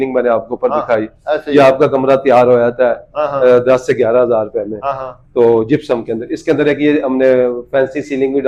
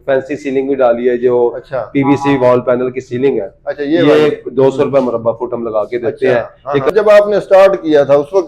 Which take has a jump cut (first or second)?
second